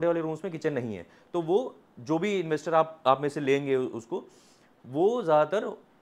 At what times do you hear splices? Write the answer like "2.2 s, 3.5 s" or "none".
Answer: none